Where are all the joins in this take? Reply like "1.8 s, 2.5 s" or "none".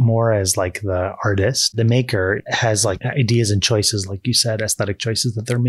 1.6 s, 2.9 s

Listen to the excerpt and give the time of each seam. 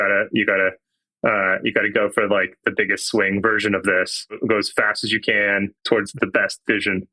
4.4 s, 6.1 s

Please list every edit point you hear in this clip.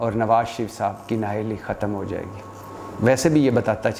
none

